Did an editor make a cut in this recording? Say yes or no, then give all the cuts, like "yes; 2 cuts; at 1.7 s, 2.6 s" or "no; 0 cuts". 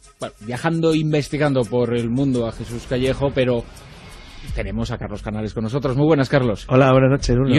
no; 0 cuts